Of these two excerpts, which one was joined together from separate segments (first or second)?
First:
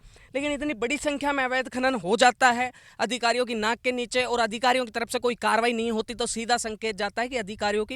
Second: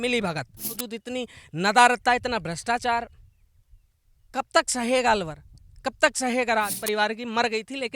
second